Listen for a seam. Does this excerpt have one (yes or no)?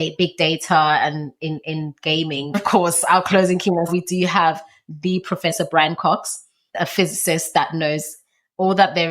yes